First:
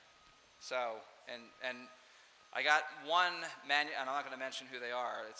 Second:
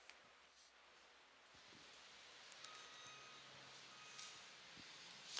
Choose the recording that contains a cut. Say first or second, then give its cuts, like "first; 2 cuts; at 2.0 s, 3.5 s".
first; 1 cut; at 4.2 s